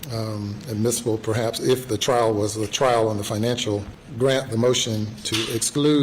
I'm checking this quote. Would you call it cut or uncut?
cut